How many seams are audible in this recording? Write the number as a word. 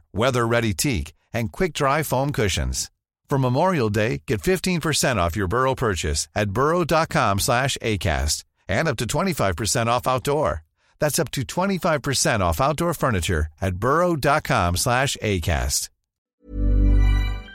one